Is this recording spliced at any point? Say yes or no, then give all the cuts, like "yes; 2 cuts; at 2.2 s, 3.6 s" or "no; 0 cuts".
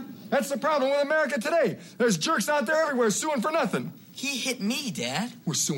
no; 0 cuts